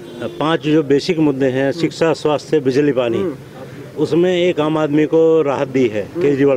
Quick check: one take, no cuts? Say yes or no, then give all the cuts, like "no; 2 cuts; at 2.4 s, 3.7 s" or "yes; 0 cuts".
yes; 0 cuts